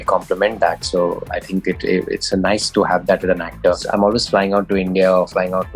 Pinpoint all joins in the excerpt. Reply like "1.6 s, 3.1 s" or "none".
3.8 s